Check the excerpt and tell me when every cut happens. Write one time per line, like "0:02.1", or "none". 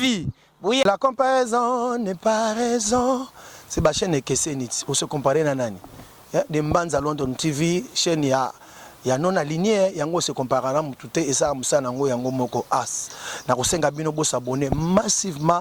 none

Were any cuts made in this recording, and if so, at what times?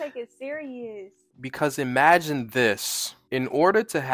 none

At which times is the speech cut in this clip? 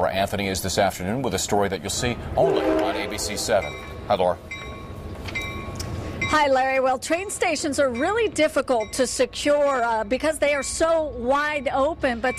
0:10.7

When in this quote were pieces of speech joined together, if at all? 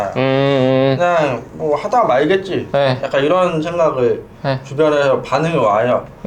0:01.5

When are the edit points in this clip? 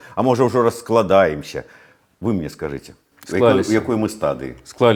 none

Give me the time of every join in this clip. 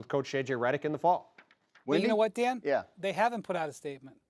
none

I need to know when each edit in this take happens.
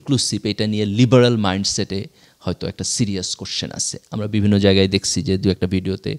none

